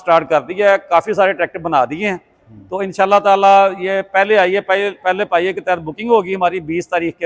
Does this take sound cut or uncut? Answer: uncut